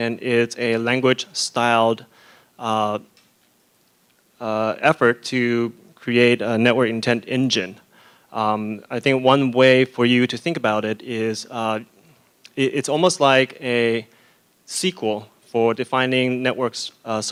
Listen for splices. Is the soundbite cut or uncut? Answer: uncut